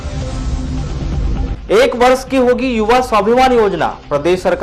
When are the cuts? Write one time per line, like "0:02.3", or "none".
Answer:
0:01.2